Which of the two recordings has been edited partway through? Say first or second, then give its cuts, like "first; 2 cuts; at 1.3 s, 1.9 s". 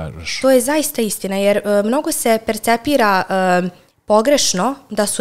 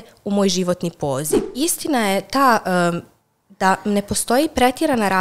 second; 1 cut; at 1.4 s